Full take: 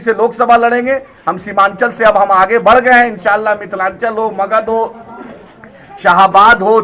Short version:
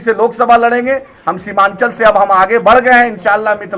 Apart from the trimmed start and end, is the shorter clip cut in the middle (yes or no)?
no